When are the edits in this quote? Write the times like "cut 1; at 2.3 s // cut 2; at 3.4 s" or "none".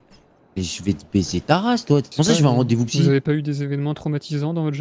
cut 1; at 2.1 s